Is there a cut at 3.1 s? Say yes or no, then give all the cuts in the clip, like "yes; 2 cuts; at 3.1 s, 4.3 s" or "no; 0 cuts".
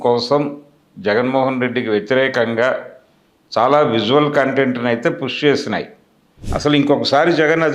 no; 1 cut; at 6.4 s